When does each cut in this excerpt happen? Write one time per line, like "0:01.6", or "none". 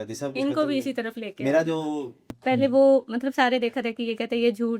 0:02.3